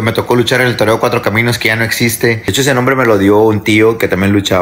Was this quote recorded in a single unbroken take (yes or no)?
no